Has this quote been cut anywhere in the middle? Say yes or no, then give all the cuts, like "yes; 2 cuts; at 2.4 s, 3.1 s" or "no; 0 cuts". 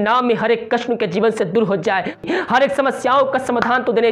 yes; 1 cut; at 2.2 s